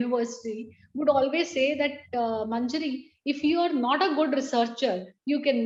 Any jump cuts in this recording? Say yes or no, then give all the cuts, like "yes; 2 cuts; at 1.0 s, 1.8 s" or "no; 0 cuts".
no; 0 cuts